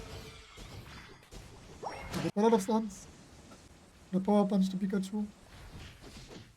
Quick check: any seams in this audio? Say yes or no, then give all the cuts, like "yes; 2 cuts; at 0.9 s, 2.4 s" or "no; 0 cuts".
yes; 1 cut; at 2.3 s